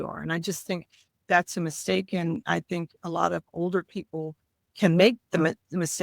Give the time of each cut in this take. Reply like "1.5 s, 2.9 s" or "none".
4.7 s